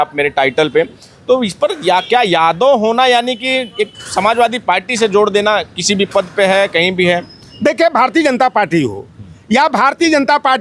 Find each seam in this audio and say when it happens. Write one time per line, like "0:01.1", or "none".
none